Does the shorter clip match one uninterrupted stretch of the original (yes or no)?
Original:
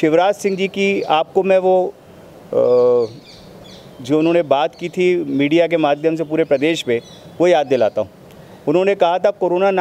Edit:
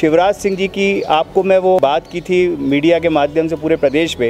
no